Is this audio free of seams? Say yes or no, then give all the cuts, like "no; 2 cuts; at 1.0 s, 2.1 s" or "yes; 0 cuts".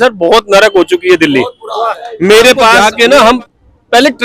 no; 1 cut; at 2.8 s